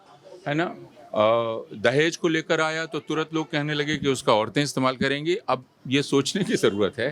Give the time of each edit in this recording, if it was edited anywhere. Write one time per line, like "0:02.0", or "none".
none